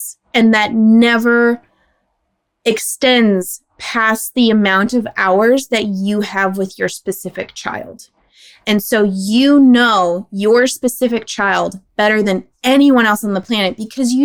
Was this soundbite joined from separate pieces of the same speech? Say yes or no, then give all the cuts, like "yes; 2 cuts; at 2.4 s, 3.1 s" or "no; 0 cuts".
no; 0 cuts